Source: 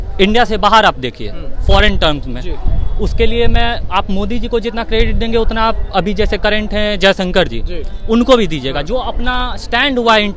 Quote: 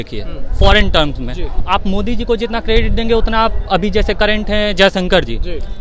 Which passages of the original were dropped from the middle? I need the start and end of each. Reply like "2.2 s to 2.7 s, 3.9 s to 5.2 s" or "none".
2.7 s to 3.8 s